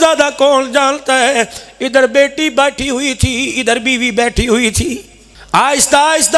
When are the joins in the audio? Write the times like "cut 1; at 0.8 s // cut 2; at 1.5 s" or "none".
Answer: none